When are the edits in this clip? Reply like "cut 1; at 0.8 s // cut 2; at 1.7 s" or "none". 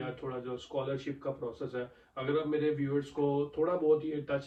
none

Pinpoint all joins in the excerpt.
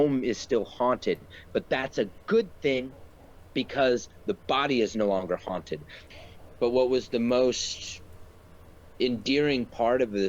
cut 1; at 6.1 s

